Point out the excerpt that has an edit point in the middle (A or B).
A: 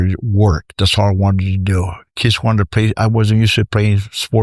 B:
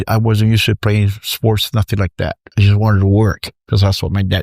B